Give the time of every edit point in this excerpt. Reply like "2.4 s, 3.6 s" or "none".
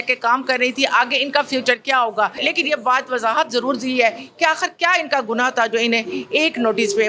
2.4 s